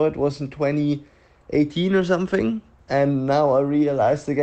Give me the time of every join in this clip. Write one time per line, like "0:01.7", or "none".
0:02.7